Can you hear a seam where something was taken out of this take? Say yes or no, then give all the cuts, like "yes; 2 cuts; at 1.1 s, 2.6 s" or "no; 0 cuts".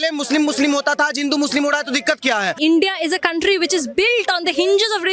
yes; 1 cut; at 2.6 s